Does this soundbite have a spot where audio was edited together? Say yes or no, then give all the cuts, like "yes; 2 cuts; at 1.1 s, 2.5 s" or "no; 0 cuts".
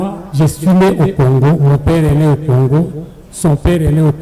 no; 0 cuts